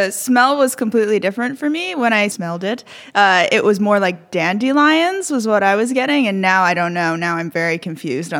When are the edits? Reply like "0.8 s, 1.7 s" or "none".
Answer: 2.3 s

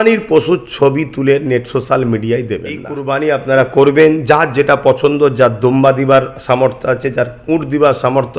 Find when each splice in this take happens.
3.0 s

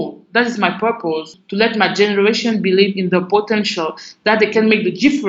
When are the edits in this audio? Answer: 1.4 s, 4.5 s

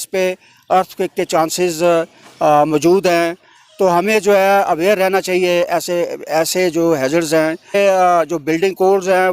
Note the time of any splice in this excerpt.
7.7 s

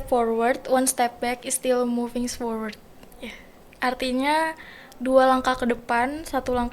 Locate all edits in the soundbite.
none

